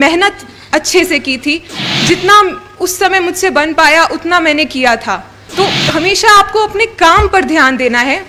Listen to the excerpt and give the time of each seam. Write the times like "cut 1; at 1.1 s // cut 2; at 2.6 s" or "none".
cut 1; at 5.4 s